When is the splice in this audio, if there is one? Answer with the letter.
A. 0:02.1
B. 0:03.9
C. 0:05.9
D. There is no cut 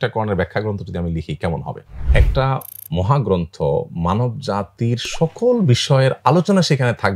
A